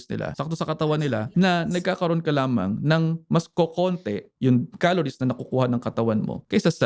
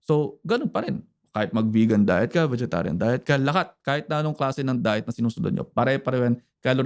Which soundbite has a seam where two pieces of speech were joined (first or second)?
first